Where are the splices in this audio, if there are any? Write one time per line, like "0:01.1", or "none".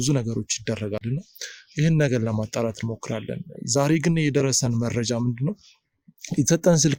none